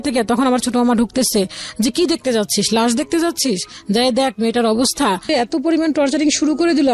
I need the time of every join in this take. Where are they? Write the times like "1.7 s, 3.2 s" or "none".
5.2 s